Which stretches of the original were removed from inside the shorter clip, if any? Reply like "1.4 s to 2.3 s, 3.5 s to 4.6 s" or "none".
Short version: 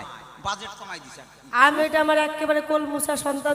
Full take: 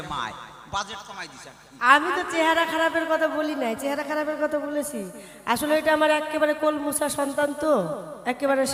2.0 s to 5.7 s